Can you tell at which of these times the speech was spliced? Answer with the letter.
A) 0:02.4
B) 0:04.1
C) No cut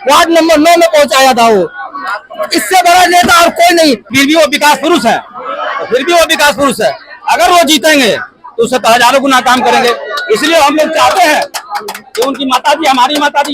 B